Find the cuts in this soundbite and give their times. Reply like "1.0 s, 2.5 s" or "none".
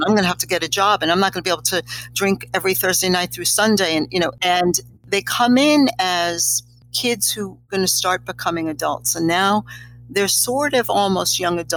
none